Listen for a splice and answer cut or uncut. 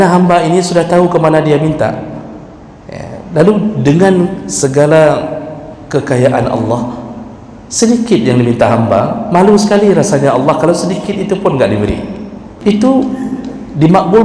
cut